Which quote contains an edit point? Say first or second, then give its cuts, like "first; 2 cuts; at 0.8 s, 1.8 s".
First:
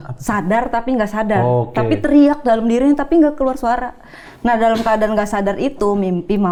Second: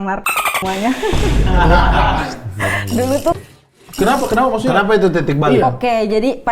second; 1 cut; at 3.4 s